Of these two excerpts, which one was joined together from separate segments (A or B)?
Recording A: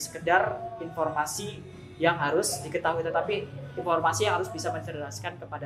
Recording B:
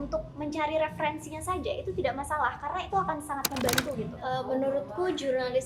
B